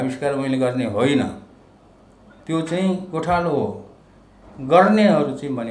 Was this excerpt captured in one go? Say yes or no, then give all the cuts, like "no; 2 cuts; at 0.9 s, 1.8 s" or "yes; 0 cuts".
yes; 0 cuts